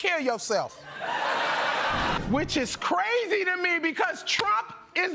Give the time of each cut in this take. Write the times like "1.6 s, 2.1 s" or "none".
none